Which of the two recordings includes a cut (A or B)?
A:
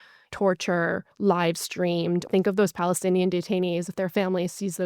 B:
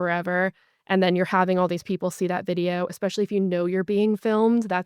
A